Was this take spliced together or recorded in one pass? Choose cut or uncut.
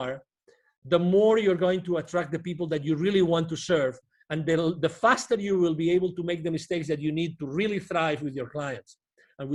uncut